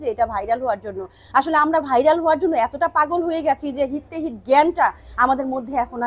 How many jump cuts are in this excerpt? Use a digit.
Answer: 0